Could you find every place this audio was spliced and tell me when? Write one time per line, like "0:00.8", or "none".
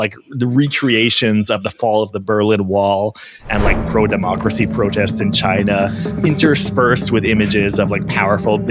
none